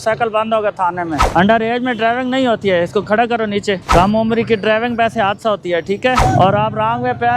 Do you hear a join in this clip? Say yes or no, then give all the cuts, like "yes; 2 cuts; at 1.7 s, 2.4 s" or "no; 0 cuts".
yes; 3 cuts; at 1.2 s, 3.8 s, 6.2 s